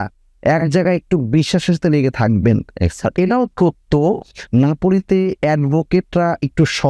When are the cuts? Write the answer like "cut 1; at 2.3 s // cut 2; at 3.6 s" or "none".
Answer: none